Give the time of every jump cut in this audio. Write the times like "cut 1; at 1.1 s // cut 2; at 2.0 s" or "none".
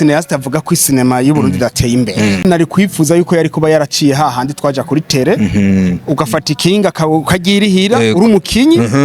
cut 1; at 2.4 s